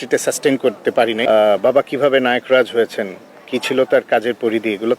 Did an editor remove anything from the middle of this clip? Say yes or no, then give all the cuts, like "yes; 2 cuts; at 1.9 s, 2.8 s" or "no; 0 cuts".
yes; 1 cut; at 1.2 s